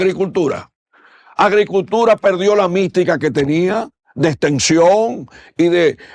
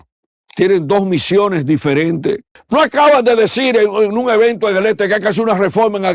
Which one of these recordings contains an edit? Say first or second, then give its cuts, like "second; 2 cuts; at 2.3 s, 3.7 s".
second; 1 cut; at 2.5 s